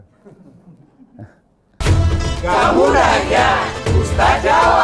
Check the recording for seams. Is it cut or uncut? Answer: cut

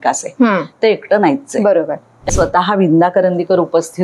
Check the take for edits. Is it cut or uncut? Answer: cut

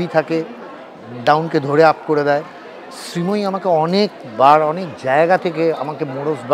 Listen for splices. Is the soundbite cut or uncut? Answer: uncut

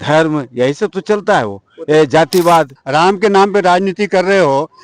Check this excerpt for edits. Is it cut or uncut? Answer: cut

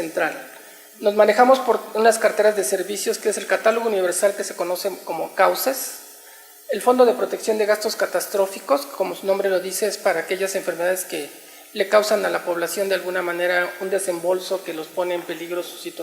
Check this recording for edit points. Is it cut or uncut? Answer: cut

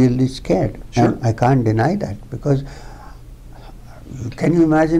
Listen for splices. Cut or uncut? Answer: uncut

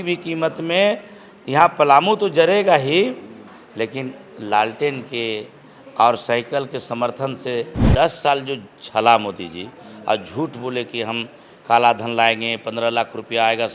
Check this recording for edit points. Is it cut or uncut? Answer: cut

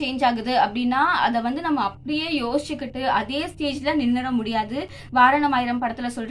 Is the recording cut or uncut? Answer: uncut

